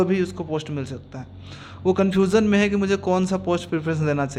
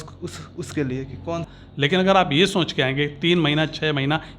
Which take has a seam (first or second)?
second